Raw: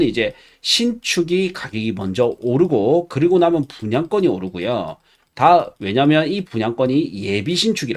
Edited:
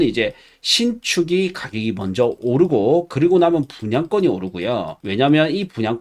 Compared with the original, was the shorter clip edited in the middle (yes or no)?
yes